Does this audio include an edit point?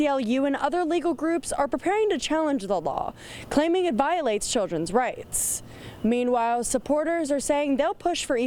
no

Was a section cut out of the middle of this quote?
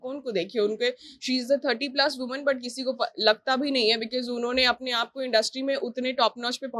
no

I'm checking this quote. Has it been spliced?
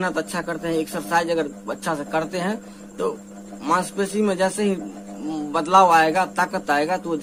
no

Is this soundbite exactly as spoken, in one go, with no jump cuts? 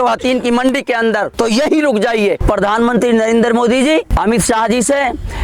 no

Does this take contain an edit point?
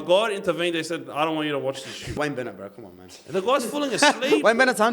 yes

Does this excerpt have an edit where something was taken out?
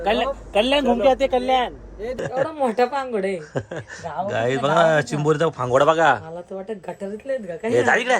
yes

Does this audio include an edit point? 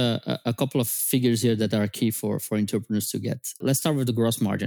yes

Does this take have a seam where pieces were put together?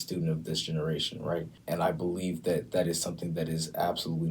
yes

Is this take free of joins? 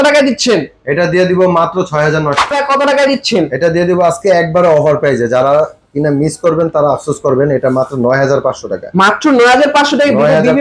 no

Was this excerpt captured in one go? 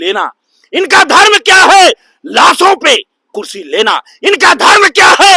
yes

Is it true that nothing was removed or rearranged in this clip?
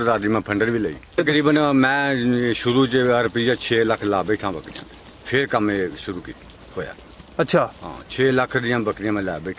no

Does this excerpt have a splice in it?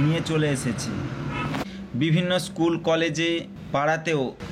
yes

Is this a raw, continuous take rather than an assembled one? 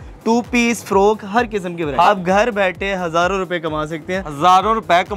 no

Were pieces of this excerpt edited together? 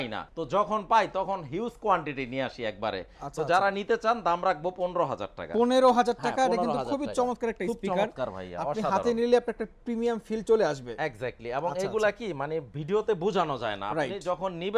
no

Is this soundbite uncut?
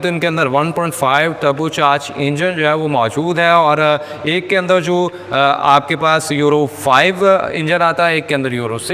yes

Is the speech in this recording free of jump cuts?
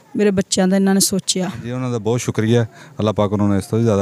no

